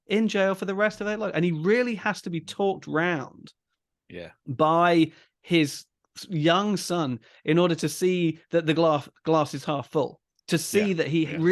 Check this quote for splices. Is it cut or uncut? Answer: uncut